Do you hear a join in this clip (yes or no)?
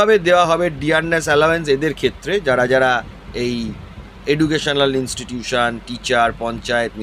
no